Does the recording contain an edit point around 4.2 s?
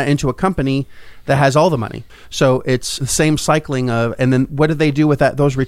no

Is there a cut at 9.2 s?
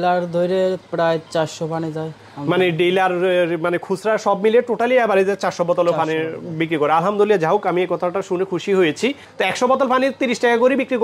yes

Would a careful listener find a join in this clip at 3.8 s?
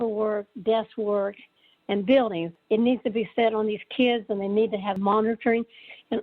no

